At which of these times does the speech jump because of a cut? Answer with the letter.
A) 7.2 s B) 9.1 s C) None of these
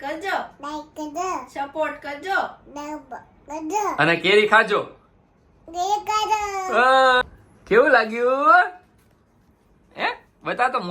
A